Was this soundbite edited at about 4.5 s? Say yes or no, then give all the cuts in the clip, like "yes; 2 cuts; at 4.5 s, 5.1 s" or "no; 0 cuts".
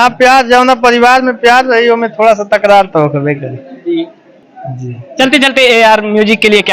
no; 0 cuts